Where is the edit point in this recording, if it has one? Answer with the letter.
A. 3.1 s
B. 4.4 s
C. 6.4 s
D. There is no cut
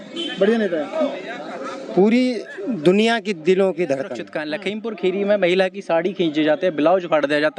B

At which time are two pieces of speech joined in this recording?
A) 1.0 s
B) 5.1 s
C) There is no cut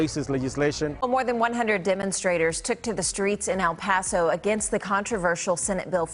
C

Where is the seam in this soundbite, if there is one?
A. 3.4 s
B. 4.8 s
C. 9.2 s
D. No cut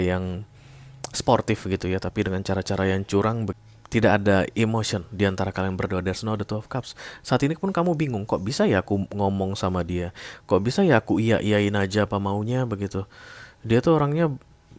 A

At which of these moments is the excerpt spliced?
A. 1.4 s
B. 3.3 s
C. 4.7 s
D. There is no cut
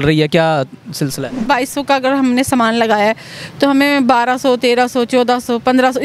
A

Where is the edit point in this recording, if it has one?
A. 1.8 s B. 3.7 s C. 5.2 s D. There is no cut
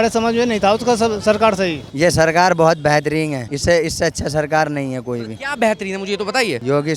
A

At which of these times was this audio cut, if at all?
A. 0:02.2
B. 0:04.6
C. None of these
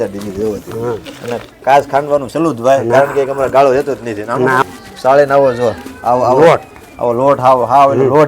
B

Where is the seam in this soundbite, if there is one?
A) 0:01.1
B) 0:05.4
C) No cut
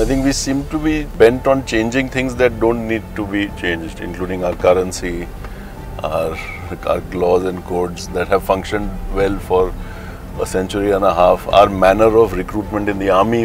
A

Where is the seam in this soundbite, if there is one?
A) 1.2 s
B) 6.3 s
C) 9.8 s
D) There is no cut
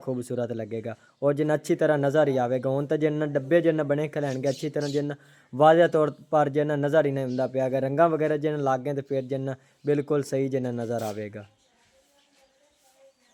D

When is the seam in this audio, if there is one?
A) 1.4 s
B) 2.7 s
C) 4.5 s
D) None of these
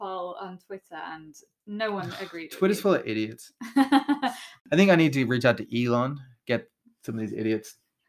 C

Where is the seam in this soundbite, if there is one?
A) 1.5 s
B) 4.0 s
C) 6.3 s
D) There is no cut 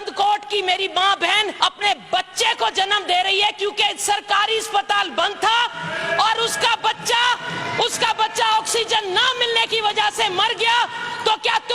A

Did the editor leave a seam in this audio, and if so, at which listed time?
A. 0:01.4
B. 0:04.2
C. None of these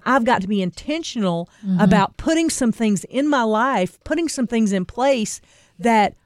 C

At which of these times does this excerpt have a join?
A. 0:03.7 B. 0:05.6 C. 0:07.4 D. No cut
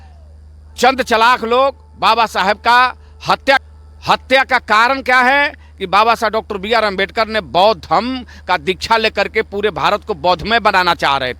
A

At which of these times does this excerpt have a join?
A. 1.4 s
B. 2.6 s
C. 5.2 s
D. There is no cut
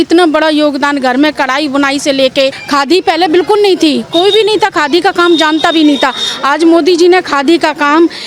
B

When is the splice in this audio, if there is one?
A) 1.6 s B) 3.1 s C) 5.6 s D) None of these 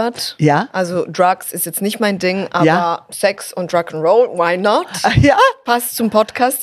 D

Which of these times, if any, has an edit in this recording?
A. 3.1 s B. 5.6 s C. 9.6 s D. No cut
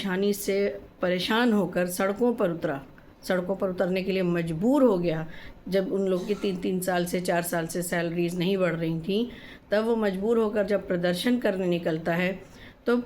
D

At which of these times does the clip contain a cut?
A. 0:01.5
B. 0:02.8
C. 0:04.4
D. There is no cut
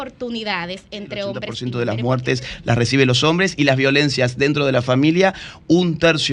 A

